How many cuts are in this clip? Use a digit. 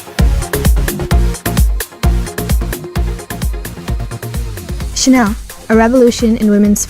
1